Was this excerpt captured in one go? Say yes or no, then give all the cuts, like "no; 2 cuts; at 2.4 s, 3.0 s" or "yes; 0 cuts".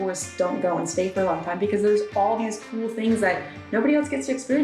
yes; 0 cuts